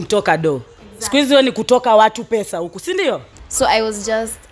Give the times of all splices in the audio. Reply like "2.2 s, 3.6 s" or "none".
3.4 s

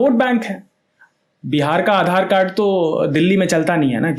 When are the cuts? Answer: none

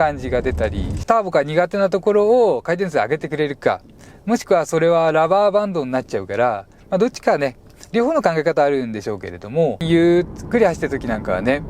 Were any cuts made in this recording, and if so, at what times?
1.0 s, 6.7 s, 9.8 s

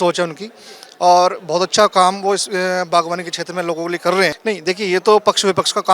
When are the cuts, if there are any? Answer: 4.4 s

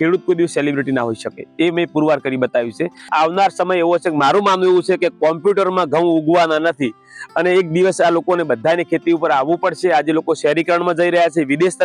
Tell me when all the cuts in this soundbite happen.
3.1 s

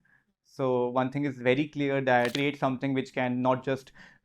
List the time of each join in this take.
2.3 s

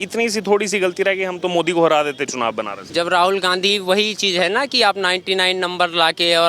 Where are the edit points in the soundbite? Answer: 2.7 s

